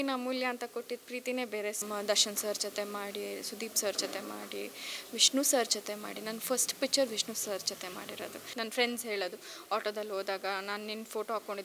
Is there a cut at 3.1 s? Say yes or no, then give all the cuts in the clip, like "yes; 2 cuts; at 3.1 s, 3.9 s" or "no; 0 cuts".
no; 2 cuts; at 1.8 s, 8.4 s